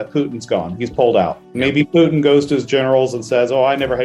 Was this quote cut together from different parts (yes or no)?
no